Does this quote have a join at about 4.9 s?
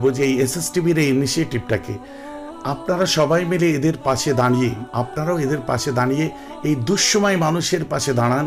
yes; 1 cut; at 4.9 s

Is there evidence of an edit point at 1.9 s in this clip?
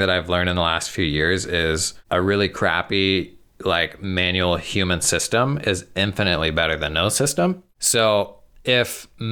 yes; 2 cuts; at 1.9 s, 7.7 s

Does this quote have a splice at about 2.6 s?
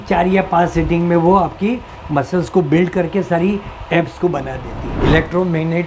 no; 1 cut; at 4.8 s

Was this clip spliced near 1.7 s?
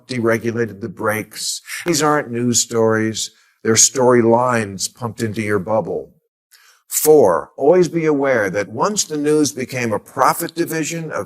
yes; 1 cut; at 1.7 s

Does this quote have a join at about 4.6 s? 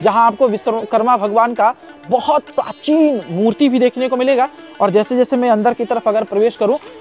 no; 0 cuts

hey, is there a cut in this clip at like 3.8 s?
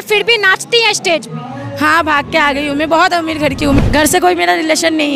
yes; 1 cut; at 3.8 s

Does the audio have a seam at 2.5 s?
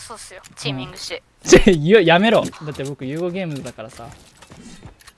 yes; 2 cuts; at 1.3 s, 2.5 s

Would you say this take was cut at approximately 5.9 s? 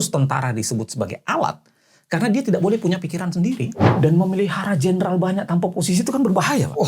no; 1 cut; at 3.8 s

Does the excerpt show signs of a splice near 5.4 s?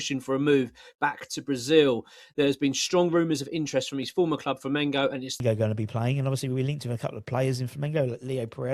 yes; 1 cut; at 5.4 s

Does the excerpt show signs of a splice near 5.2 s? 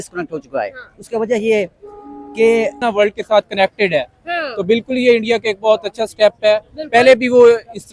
no; 1 cut; at 2.8 s

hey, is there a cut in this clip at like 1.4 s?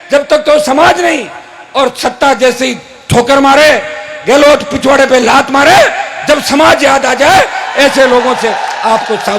no; 0 cuts

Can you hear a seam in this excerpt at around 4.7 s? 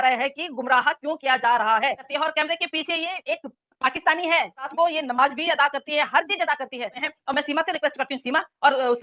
yes; 3 cuts; at 2.1 s, 4.7 s, 7.1 s

